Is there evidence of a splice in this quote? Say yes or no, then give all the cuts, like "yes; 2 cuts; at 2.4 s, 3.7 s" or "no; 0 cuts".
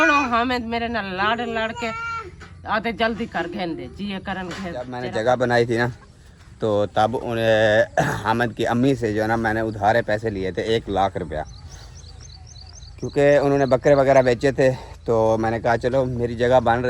yes; 1 cut; at 5.0 s